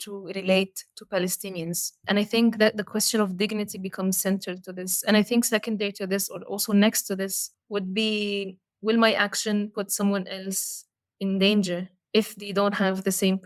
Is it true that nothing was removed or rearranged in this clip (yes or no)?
yes